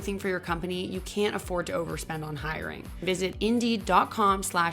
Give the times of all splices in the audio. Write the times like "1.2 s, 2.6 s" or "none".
3.0 s